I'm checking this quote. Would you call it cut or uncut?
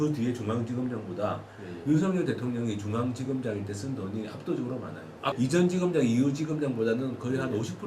cut